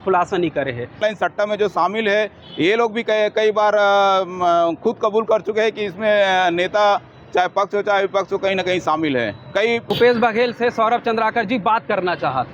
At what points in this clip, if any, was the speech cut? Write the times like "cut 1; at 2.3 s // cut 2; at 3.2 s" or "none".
cut 1; at 1.0 s // cut 2; at 9.9 s